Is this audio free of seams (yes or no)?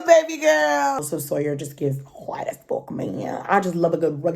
no